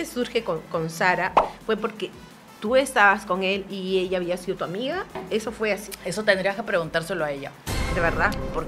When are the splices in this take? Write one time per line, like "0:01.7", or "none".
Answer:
none